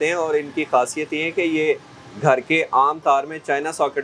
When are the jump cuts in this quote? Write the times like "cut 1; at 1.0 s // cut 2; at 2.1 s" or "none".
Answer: none